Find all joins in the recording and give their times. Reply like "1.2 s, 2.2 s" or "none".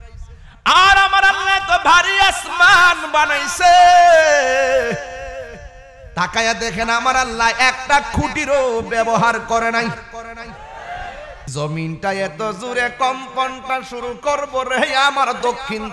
11.4 s